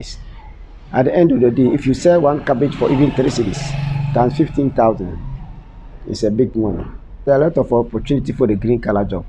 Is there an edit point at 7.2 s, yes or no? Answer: yes